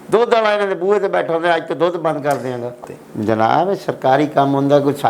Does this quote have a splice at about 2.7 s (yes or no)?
yes